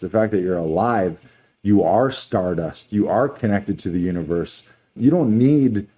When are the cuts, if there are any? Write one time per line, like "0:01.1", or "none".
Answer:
0:04.9